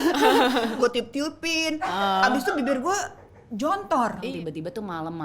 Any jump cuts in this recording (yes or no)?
yes